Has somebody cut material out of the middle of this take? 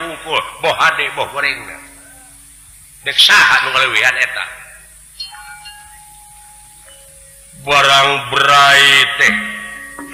no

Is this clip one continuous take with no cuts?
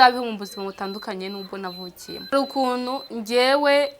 no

